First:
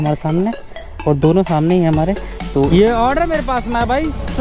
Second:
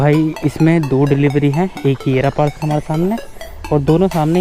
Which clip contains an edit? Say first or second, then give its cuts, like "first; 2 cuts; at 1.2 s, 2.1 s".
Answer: first; 1 cut; at 2.7 s